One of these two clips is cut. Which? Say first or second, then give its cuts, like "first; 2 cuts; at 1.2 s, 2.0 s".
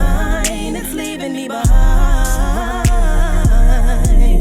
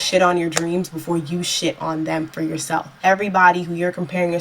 second; 1 cut; at 2.9 s